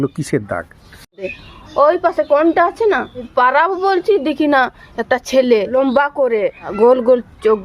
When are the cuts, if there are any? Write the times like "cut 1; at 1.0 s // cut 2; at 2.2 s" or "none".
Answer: cut 1; at 1.3 s // cut 2; at 3.3 s // cut 3; at 5.7 s // cut 4; at 6.6 s